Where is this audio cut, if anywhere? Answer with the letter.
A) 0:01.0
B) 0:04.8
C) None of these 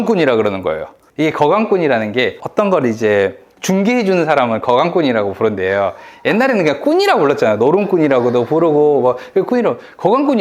A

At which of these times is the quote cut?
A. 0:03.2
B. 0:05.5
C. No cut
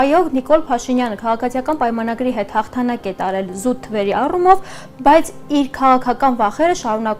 C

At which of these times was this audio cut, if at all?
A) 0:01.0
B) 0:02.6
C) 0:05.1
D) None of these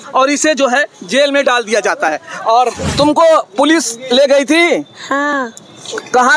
B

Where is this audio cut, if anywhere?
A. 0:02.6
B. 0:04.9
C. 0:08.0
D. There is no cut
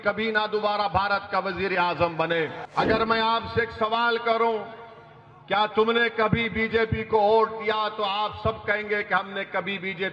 A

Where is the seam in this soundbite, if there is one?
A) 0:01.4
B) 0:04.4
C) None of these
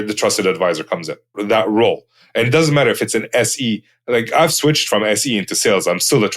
A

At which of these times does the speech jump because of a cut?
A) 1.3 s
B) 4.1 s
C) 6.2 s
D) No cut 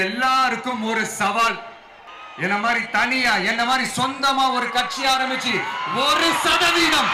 D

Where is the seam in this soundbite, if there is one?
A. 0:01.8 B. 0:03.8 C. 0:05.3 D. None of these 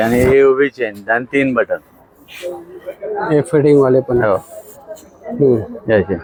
D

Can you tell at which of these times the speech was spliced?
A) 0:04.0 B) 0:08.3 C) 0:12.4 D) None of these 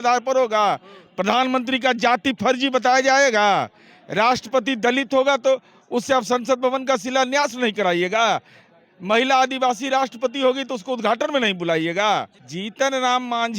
C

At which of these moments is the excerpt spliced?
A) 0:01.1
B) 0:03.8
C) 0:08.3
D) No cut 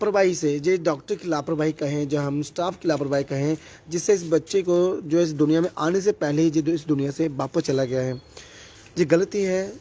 D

